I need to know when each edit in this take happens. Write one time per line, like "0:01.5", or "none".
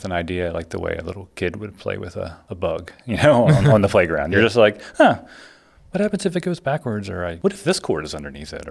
0:02.4
0:07.3